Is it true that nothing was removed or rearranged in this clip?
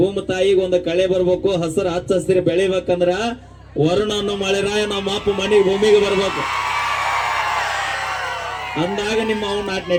yes; 0 cuts

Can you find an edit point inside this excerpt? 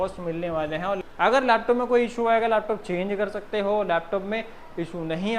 yes; 1 cut; at 1.0 s

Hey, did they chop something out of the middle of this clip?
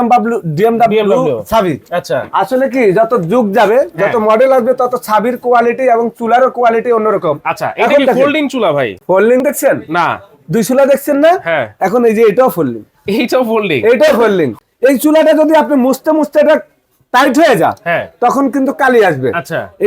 yes; 2 cuts; at 9.0 s, 14.5 s

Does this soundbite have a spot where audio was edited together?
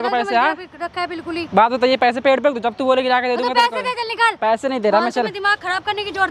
no; 0 cuts

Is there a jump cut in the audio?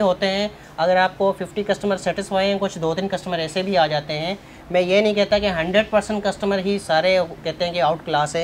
no; 0 cuts

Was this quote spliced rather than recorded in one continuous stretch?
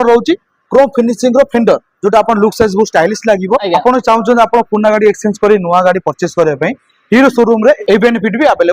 yes; 2 cuts; at 3.6 s, 7.8 s

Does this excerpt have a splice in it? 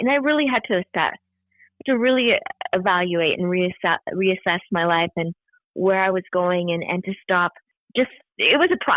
yes; 1 cut; at 8.0 s

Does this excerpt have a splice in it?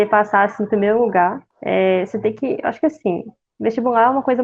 yes; 1 cut; at 1.5 s

